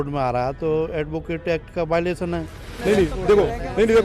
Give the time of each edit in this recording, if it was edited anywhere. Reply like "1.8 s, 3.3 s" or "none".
2.7 s